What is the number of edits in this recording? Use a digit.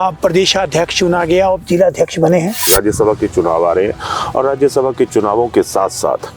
1